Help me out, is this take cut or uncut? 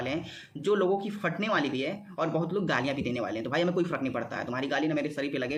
uncut